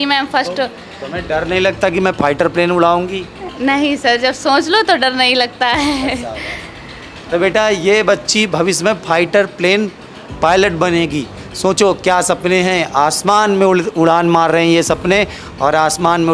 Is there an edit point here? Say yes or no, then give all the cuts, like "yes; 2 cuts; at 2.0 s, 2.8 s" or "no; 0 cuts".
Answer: no; 0 cuts